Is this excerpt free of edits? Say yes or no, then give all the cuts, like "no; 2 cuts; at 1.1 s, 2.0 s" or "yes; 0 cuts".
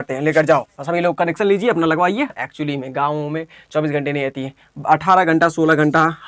no; 1 cut; at 2.3 s